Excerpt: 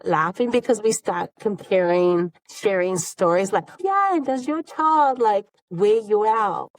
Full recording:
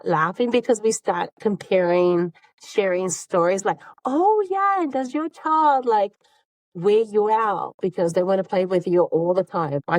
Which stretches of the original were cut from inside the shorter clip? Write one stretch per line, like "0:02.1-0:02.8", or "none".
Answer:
0:02.4-0:02.6
0:03.9-0:04.5
0:06.3-0:06.6